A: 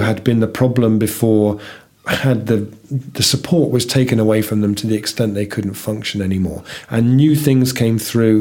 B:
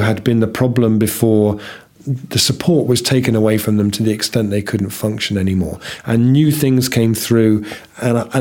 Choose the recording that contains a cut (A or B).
B